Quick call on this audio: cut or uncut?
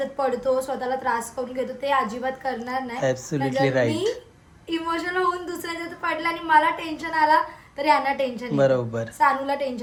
uncut